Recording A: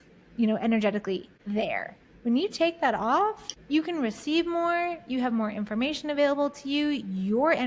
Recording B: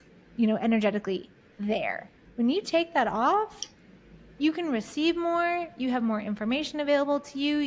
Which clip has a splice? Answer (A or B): A